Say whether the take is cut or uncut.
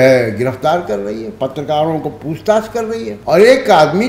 cut